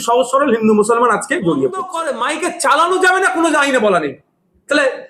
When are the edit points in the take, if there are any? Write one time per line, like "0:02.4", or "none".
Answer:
0:02.0